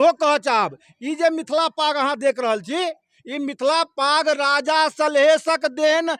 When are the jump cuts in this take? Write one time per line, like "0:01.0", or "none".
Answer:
none